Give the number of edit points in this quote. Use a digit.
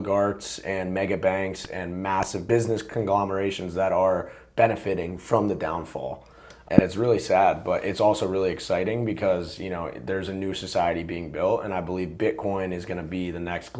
2